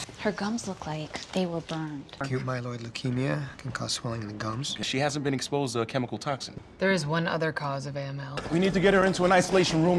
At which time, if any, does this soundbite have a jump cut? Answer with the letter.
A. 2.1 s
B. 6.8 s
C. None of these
A